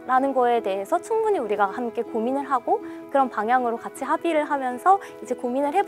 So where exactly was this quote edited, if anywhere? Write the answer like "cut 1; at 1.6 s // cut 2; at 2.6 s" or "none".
cut 1; at 3.0 s